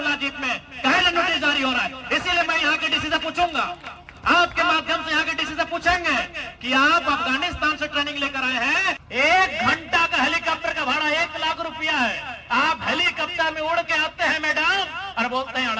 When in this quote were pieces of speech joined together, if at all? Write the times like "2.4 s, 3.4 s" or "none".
9.0 s